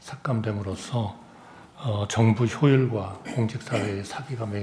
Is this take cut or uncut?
uncut